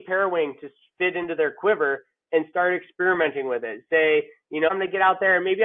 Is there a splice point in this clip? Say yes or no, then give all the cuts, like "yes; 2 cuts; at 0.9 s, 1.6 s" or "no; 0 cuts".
yes; 1 cut; at 4.7 s